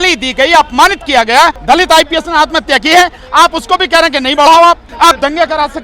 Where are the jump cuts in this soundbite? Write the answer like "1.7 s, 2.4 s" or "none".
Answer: 1.6 s, 4.9 s